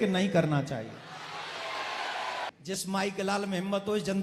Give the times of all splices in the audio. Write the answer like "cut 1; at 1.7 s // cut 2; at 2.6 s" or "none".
cut 1; at 2.5 s